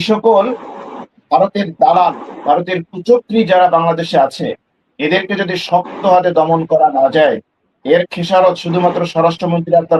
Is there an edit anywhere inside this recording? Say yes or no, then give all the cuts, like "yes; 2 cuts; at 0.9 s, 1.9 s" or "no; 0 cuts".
no; 0 cuts